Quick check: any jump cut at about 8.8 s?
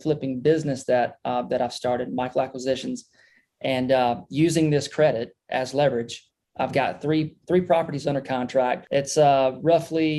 yes; 1 cut; at 8.8 s

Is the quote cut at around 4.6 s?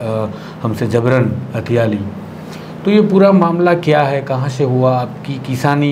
no; 0 cuts

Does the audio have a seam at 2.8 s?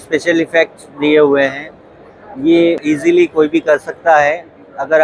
yes; 1 cut; at 2.8 s

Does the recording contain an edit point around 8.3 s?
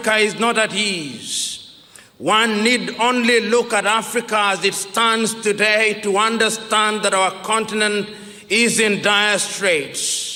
no; 0 cuts

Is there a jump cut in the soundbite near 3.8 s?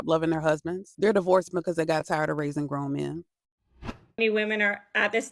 yes; 1 cut; at 3.8 s

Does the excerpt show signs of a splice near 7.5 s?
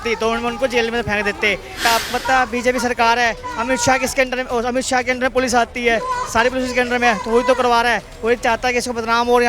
no; 1 cut; at 1.8 s

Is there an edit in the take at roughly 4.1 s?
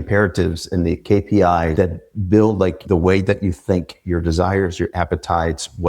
no; 2 cuts; at 1.7 s, 2.8 s

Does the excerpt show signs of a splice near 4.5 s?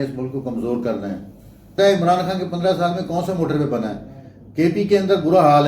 no; 1 cut; at 1.7 s

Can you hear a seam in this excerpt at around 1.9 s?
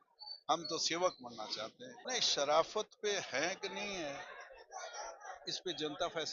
yes; 1 cut; at 1.9 s

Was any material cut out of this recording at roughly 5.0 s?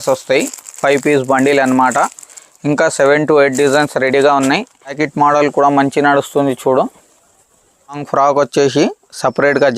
yes; 2 cuts; at 5.0 s, 8.0 s

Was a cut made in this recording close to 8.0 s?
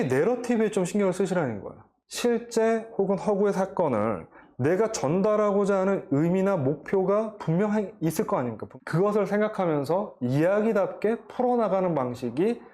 no; 1 cut; at 2.0 s

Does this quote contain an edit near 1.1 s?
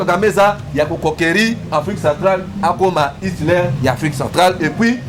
no; 0 cuts

